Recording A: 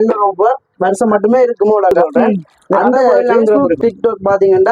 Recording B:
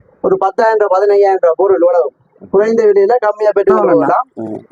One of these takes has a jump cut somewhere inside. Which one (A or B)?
A